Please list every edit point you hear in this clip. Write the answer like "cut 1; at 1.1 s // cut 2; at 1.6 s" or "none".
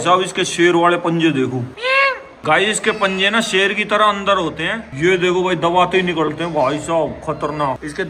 none